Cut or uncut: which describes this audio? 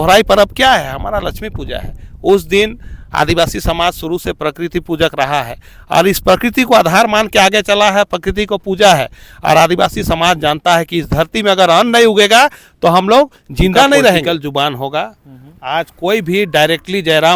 cut